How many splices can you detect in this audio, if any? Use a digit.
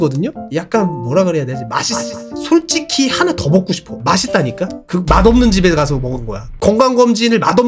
1